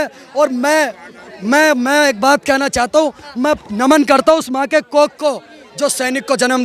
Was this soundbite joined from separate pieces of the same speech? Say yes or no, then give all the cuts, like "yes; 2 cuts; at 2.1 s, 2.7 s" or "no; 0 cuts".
no; 0 cuts